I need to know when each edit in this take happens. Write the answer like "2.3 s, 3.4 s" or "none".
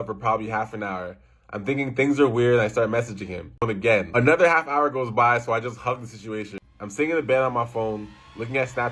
3.7 s, 6.6 s